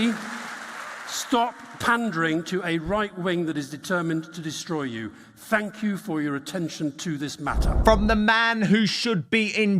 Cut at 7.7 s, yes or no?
yes